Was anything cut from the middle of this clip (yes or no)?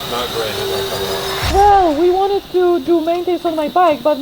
yes